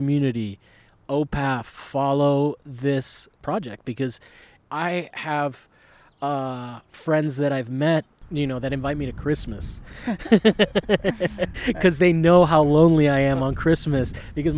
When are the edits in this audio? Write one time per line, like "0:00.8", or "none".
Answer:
0:03.4
0:04.5
0:08.1